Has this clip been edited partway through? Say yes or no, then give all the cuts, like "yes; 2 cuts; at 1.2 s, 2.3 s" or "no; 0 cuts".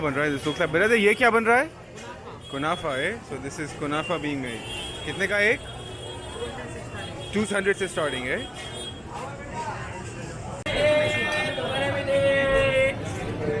no; 0 cuts